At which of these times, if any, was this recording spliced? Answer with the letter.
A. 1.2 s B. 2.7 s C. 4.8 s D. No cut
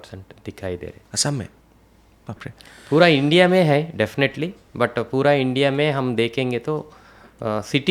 D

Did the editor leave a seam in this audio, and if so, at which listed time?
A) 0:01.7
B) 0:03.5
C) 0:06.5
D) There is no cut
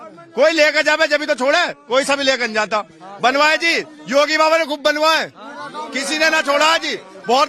D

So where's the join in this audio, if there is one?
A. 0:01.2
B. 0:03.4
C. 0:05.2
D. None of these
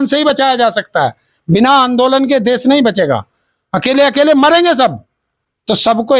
D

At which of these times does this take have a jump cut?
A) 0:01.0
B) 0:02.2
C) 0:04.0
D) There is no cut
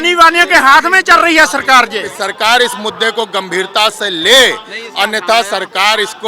B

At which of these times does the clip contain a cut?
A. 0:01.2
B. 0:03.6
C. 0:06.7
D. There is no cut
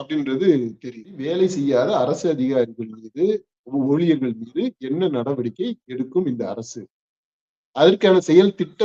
A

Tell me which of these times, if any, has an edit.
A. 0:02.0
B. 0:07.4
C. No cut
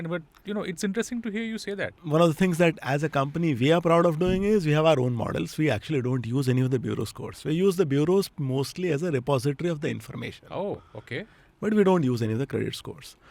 A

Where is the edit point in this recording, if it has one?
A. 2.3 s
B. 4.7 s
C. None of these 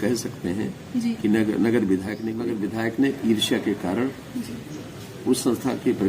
A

